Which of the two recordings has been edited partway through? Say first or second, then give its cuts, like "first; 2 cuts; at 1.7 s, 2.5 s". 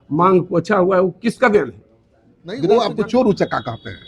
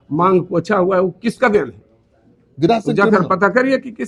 first; 1 cut; at 2.6 s